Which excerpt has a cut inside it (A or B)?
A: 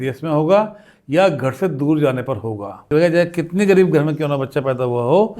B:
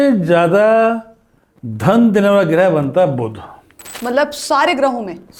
A